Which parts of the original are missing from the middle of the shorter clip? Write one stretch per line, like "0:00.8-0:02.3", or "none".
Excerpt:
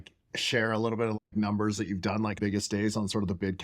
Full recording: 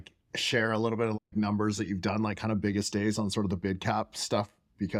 0:02.4-0:02.6